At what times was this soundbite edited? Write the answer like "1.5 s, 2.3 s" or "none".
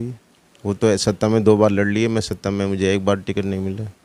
none